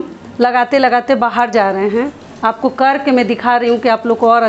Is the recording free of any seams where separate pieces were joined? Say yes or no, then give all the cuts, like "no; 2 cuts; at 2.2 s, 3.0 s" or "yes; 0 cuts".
yes; 0 cuts